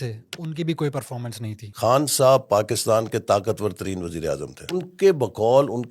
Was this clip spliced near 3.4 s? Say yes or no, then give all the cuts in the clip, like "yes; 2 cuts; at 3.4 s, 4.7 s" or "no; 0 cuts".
no; 2 cuts; at 1.7 s, 4.9 s